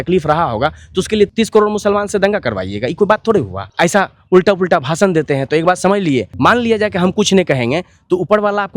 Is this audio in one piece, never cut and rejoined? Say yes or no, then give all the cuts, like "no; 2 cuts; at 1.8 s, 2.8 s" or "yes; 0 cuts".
no; 3 cuts; at 1.3 s, 3.6 s, 6.3 s